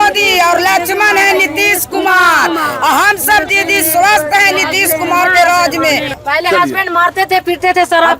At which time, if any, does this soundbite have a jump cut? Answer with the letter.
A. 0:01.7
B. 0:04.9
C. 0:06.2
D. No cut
C